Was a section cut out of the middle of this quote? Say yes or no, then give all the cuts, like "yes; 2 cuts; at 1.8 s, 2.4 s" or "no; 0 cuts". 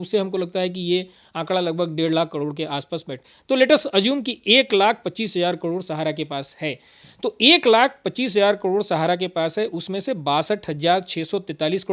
no; 0 cuts